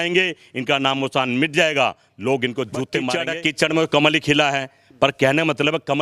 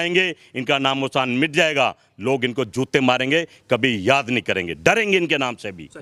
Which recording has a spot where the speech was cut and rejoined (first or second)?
first